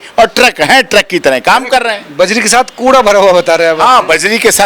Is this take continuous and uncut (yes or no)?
yes